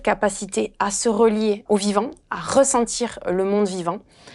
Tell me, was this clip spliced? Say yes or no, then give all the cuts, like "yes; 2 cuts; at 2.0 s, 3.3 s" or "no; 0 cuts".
yes; 1 cut; at 1.6 s